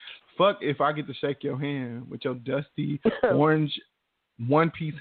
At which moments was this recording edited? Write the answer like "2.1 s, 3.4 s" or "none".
none